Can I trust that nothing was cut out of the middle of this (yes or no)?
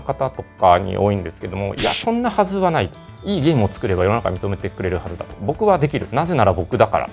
yes